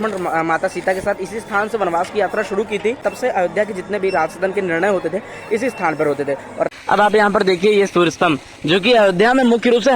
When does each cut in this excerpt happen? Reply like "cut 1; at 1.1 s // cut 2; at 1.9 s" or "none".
cut 1; at 3.0 s // cut 2; at 6.7 s